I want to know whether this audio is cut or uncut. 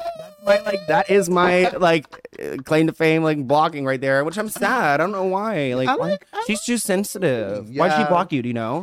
uncut